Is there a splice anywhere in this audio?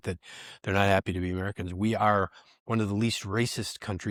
no; 0 cuts

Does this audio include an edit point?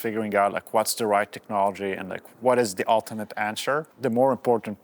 yes; 2 cuts; at 2.2 s, 3.9 s

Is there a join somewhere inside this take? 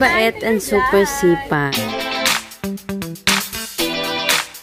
yes; 1 cut; at 2.2 s

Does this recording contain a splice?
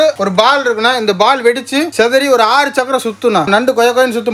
no; 0 cuts

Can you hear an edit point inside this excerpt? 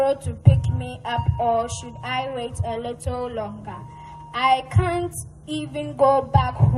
no; 0 cuts

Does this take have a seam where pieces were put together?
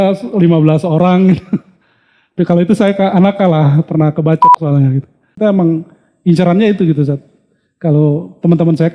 yes; 1 cut; at 5.3 s

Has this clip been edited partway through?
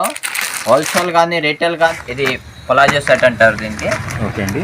yes; 1 cut; at 2.0 s

